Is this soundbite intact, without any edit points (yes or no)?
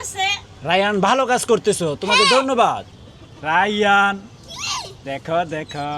no